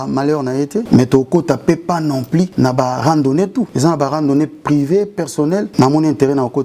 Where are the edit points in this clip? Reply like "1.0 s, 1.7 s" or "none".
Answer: 0.9 s, 2.5 s, 3.7 s, 5.7 s